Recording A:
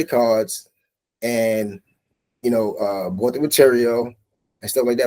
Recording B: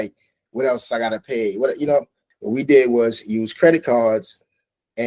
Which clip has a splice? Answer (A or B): B